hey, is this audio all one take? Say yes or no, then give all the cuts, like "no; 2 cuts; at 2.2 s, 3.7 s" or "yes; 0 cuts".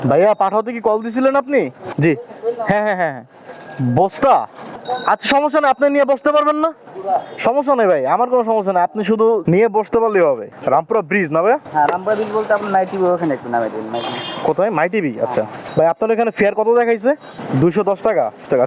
yes; 0 cuts